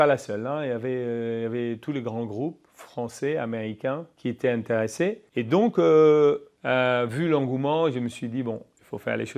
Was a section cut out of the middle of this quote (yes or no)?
yes